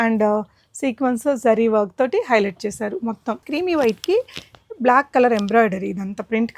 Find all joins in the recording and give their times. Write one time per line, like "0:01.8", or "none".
0:03.4